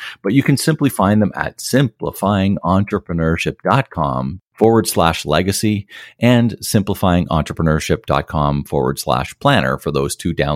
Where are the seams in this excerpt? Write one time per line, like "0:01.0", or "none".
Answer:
0:04.4